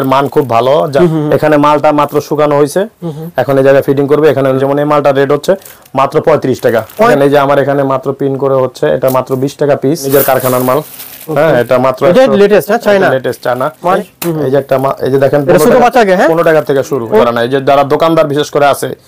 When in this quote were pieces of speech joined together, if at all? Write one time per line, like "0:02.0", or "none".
0:01.0
0:04.6
0:07.1
0:10.1
0:14.0
0:17.2